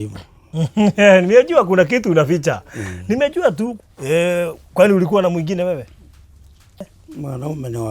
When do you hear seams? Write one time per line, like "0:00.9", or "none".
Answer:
0:03.8
0:06.9